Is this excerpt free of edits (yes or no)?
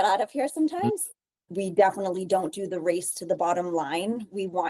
no